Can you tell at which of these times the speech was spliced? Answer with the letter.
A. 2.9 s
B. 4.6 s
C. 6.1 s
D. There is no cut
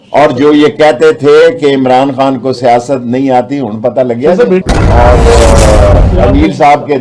B